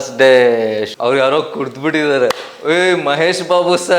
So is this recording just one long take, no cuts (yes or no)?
no